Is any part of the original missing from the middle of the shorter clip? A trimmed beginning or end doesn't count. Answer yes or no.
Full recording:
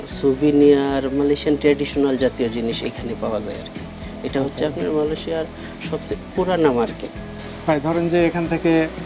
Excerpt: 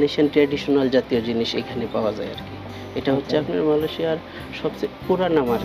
no